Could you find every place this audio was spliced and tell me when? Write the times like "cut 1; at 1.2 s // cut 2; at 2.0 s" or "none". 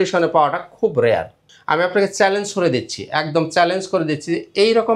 none